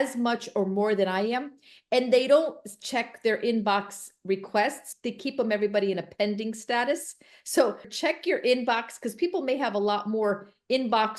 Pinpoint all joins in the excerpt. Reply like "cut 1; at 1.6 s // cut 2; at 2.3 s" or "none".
cut 1; at 4.9 s // cut 2; at 7.9 s